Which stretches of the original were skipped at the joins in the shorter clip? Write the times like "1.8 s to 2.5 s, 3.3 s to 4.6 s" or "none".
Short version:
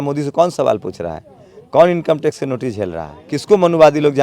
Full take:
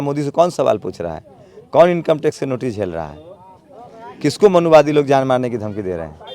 3.1 s to 4.0 s

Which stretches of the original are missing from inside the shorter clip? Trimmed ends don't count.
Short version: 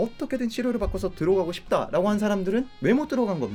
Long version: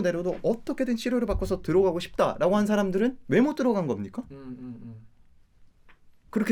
none

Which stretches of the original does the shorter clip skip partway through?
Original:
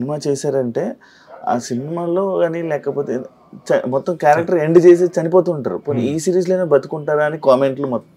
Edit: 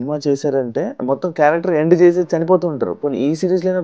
1.0 s to 3.8 s

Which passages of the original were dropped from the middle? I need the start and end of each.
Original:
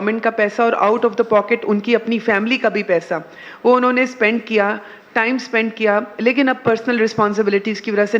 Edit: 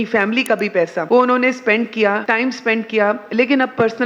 3.1 s to 3.5 s, 4.8 s to 5.1 s

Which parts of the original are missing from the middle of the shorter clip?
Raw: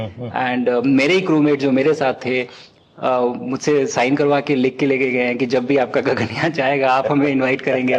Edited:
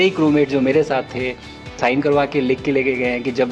2.9 s to 3.9 s

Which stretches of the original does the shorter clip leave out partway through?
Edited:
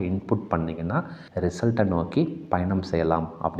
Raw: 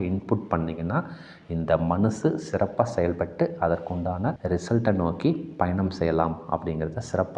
1.3 s to 4.4 s

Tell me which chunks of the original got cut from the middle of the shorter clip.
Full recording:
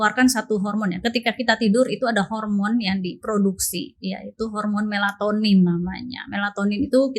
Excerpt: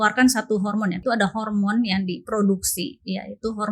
1.0 s to 1.9 s

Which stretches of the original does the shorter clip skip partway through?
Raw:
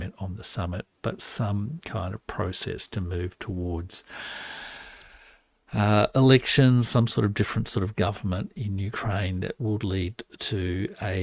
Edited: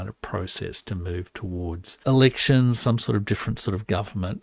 4.1 s to 6.1 s

